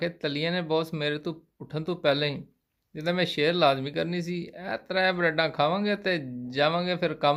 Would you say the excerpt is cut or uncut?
uncut